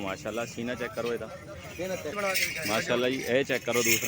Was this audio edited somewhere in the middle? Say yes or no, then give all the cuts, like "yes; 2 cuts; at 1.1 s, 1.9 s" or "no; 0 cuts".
yes; 1 cut; at 2.1 s